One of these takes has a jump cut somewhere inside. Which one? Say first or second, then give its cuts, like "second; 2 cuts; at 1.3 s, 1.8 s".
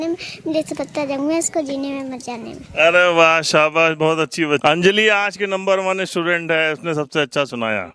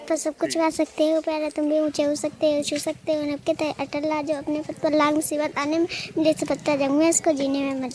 first; 1 cut; at 4.6 s